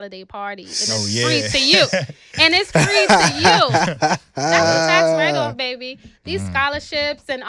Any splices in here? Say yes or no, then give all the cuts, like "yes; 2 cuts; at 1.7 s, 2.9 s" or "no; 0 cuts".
no; 0 cuts